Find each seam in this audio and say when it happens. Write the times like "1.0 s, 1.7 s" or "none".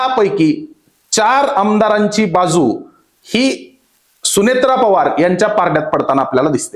none